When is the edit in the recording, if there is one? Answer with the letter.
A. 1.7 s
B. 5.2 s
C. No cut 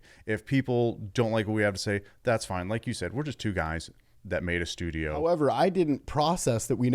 B